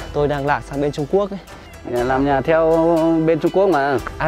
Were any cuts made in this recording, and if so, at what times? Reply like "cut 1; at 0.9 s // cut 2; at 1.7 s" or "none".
cut 1; at 1.9 s